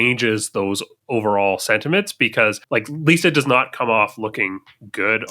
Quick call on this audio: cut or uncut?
cut